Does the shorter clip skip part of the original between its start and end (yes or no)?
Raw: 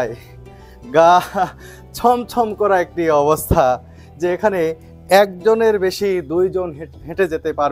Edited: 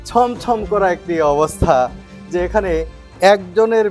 no